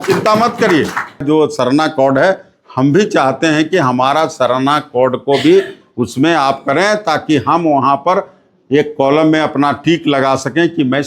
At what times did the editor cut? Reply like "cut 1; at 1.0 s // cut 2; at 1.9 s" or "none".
cut 1; at 1.2 s